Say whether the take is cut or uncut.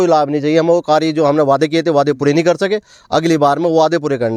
uncut